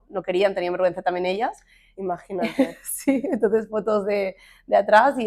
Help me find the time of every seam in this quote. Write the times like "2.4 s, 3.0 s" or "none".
none